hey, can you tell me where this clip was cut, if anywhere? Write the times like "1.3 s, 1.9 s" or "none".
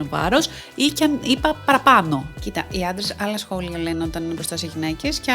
2.4 s